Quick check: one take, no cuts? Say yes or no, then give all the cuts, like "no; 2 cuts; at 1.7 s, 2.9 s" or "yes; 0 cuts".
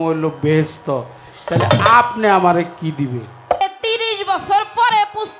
no; 1 cut; at 3.6 s